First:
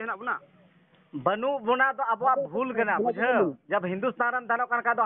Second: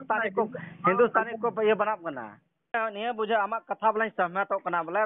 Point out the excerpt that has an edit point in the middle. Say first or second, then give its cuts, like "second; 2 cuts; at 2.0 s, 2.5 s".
second; 1 cut; at 2.7 s